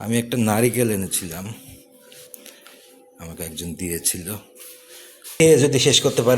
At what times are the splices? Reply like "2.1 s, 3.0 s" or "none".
5.4 s